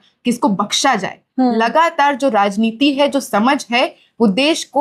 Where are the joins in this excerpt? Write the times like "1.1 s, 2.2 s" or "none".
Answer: none